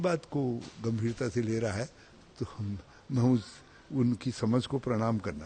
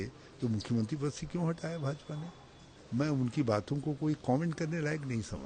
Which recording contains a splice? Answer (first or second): second